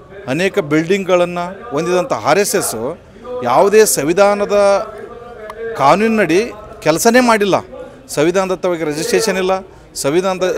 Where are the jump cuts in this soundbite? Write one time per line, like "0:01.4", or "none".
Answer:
none